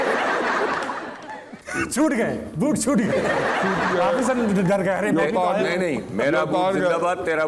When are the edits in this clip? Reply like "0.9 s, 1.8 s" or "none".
1.6 s